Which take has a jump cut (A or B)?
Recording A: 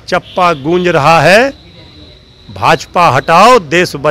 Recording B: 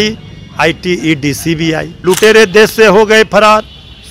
B